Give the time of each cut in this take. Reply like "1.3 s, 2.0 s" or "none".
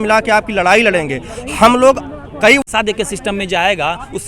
2.6 s